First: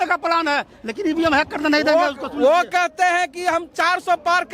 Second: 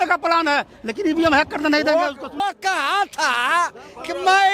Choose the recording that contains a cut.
second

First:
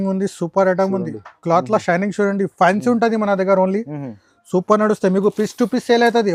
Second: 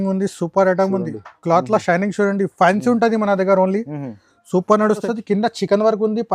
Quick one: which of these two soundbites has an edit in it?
second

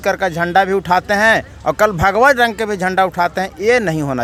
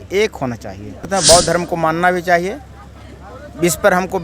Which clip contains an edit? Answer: second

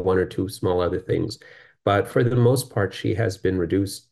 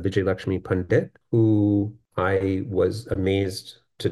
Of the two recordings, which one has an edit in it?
second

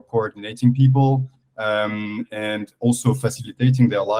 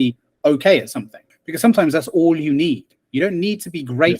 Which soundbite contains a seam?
second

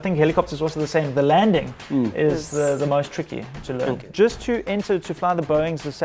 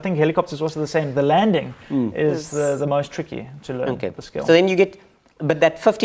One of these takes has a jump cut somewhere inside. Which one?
first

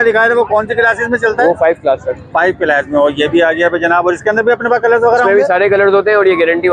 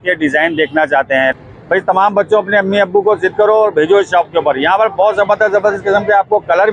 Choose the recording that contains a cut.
second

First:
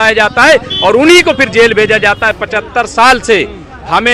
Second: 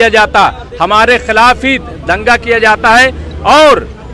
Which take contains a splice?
first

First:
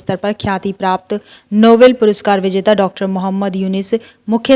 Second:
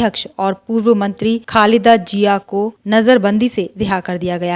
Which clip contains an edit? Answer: second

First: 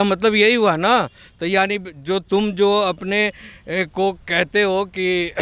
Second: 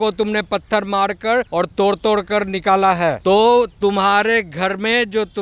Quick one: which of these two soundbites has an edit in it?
second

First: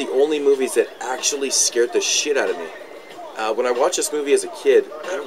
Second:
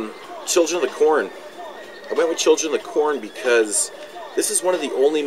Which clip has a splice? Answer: second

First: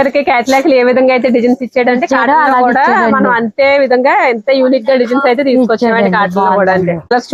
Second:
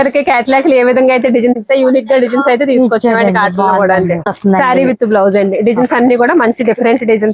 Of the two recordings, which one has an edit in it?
second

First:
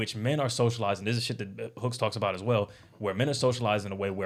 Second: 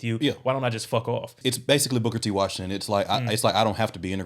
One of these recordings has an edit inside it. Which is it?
second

